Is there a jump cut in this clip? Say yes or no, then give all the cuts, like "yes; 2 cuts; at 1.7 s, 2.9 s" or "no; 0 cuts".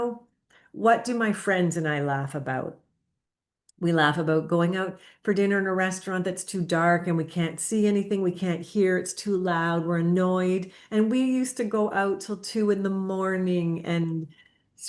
no; 0 cuts